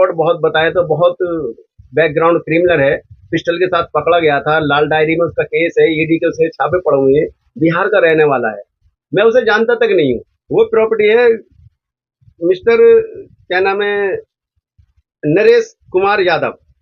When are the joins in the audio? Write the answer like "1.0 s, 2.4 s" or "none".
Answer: 10.3 s